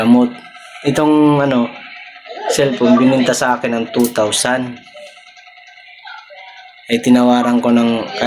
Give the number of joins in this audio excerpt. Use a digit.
0